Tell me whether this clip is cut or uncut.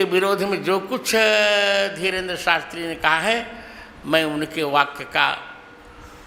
uncut